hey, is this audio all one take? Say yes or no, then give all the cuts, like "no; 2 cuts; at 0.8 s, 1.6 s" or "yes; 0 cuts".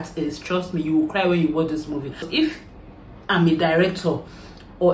no; 1 cut; at 2.3 s